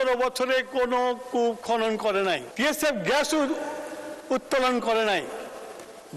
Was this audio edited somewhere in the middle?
yes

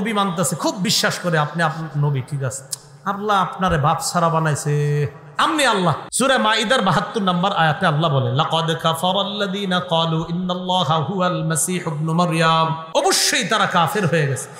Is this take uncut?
no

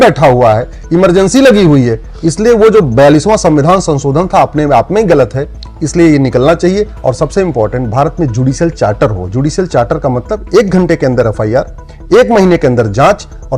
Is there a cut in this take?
yes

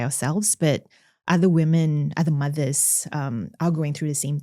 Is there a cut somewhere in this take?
no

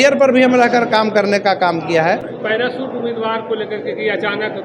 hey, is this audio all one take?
no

